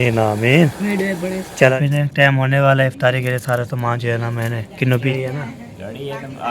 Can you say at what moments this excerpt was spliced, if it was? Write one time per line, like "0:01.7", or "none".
0:01.7
0:05.1